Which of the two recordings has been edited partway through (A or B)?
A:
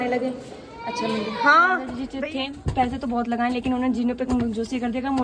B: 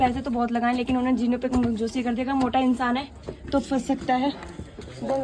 A